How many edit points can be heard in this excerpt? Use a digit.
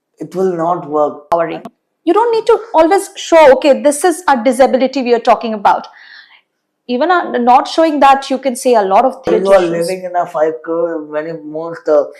2